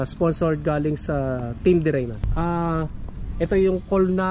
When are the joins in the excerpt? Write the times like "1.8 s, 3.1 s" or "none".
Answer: 2.2 s